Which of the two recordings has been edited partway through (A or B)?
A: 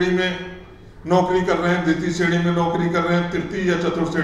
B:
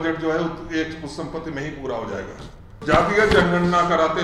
B